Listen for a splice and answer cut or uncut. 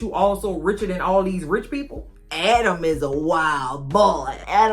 cut